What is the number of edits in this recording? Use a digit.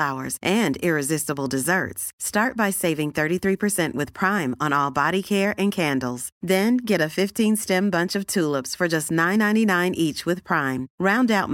0